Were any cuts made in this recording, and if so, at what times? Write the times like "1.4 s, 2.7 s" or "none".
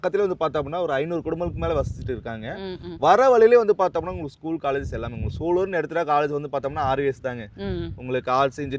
none